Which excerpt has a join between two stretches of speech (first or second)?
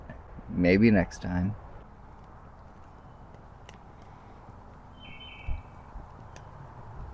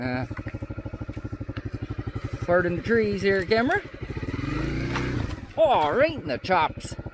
first